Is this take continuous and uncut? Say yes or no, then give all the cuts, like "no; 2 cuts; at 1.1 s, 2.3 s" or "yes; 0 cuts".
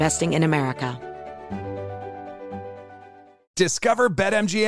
no; 2 cuts; at 1.0 s, 3.4 s